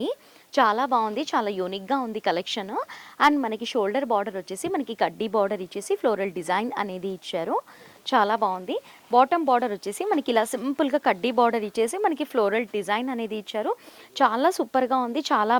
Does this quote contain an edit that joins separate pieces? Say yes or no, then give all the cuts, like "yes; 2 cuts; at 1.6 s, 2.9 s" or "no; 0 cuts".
no; 0 cuts